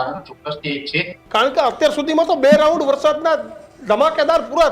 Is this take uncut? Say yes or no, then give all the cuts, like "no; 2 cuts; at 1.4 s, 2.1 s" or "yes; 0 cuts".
no; 1 cut; at 1.1 s